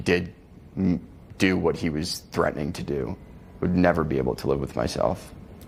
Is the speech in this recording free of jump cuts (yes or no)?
yes